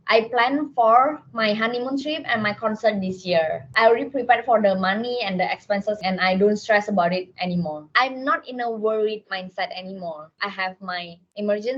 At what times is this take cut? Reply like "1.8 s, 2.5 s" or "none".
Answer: 3.7 s, 6.0 s, 7.9 s, 10.3 s